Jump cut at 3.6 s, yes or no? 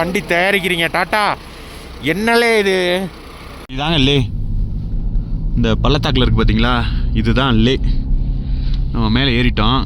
yes